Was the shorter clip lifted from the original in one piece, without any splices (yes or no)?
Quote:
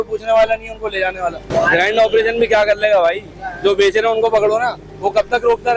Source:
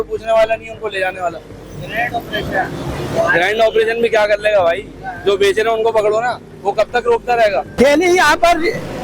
no